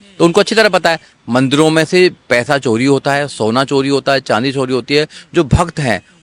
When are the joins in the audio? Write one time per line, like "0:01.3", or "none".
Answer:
0:01.1

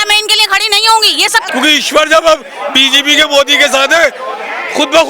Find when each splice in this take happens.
0:01.5

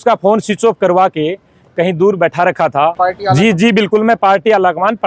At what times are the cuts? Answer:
0:02.9

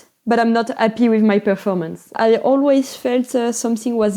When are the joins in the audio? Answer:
0:02.1

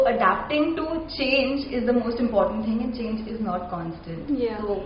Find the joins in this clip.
none

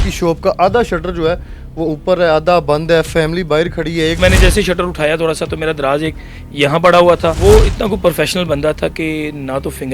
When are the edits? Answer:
0:04.2
0:07.4

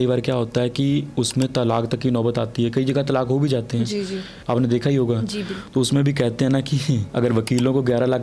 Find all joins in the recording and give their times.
0:04.3
0:07.1

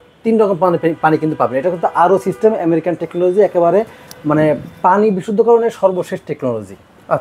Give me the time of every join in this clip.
none

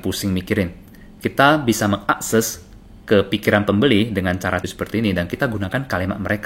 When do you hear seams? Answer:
0:04.6

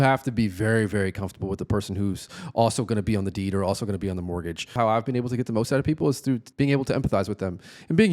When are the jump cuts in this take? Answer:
0:04.8
0:06.5

